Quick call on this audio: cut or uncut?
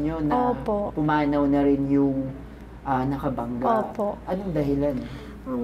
uncut